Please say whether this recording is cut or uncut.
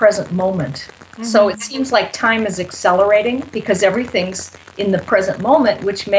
uncut